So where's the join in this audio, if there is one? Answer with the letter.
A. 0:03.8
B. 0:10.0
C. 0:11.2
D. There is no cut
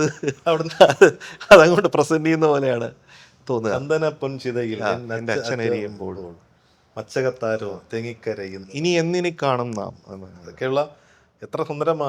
D